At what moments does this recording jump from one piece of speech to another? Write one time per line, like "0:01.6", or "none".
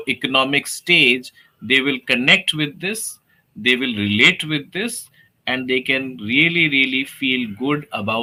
none